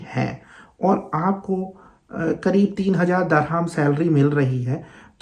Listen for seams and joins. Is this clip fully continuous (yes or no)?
yes